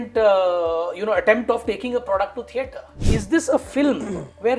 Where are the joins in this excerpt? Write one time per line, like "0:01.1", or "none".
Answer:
0:03.0